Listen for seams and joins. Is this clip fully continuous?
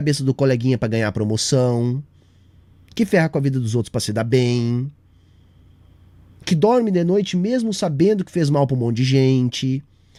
yes; 0 cuts

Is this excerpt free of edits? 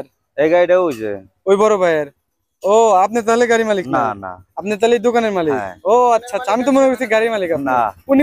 yes; 0 cuts

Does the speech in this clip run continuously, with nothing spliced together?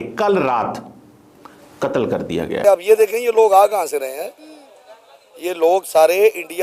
no; 1 cut; at 2.6 s

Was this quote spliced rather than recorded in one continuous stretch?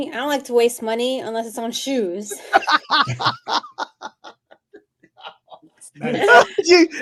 no; 0 cuts

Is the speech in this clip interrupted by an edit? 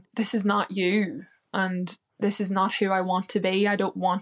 no; 0 cuts

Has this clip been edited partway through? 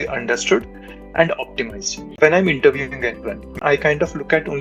yes; 2 cuts; at 2.2 s, 3.5 s

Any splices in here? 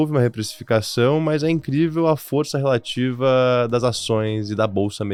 no; 0 cuts

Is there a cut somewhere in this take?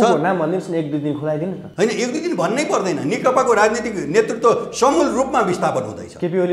yes; 1 cut; at 1.6 s

